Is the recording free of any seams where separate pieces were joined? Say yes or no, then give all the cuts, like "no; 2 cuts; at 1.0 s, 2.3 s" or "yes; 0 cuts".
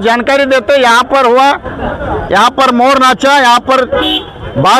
yes; 0 cuts